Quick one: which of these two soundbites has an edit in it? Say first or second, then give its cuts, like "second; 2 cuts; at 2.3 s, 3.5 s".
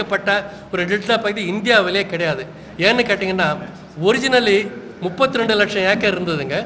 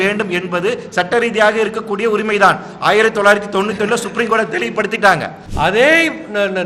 second; 1 cut; at 5.4 s